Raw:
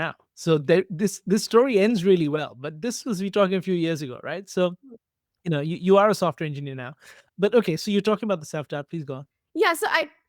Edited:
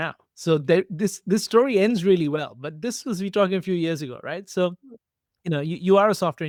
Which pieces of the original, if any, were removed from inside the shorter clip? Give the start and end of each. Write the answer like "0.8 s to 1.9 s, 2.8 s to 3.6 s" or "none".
none